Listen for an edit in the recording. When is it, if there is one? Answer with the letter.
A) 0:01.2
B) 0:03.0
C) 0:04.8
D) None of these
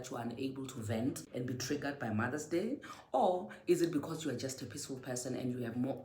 A